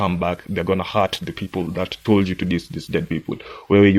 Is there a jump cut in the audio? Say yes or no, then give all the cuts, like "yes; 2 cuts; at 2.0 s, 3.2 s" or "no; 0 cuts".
no; 0 cuts